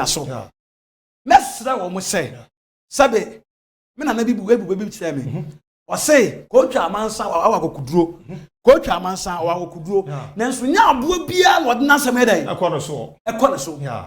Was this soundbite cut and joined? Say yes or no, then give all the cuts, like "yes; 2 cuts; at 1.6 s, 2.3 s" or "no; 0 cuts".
no; 0 cuts